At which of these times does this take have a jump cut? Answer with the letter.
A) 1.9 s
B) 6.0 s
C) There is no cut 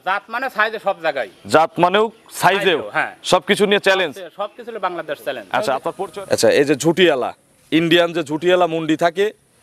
B